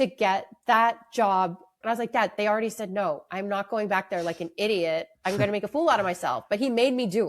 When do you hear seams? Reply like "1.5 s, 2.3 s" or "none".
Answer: 1.7 s